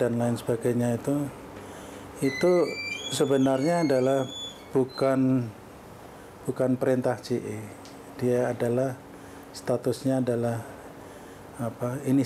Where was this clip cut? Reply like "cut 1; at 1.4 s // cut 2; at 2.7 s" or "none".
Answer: none

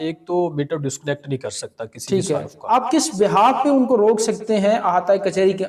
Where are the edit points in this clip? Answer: cut 1; at 2.7 s

